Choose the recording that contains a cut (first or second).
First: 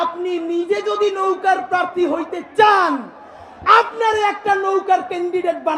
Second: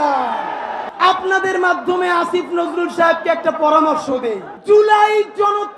second